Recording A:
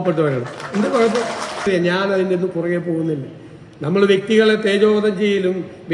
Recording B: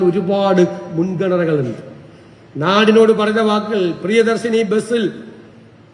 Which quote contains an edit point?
A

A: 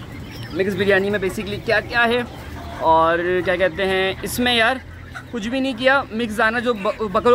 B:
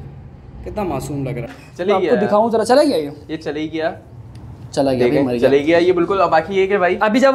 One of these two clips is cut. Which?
B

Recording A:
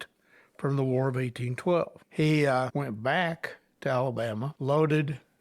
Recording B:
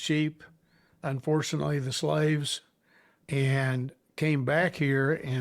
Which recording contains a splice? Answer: A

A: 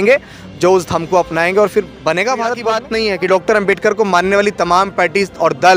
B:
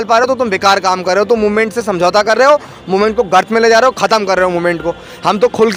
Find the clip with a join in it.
A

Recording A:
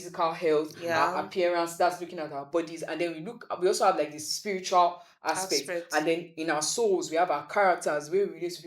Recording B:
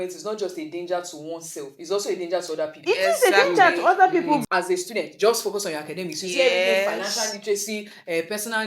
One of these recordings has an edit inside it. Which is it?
B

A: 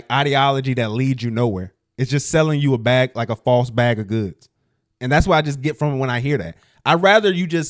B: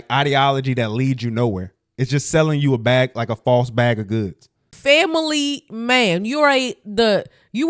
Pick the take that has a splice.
B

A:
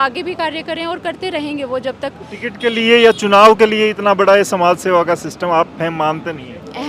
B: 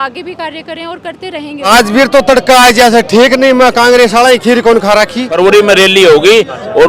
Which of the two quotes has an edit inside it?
B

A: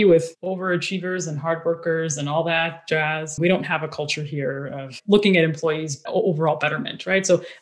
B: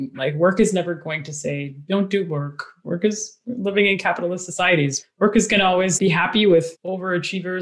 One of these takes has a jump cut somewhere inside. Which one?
A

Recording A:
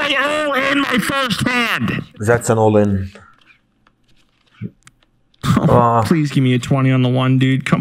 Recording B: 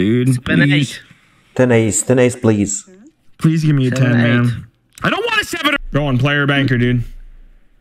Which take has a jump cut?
B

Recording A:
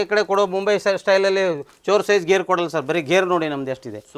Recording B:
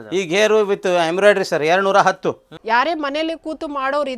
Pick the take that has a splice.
B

